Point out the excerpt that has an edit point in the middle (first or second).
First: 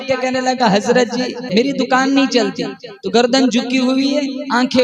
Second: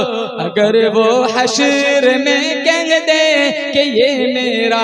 first